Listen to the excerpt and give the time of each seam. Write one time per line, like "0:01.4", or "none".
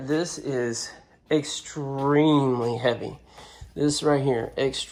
none